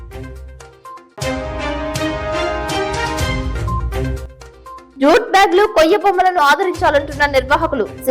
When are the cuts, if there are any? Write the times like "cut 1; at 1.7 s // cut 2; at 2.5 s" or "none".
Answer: cut 1; at 1.0 s // cut 2; at 4.2 s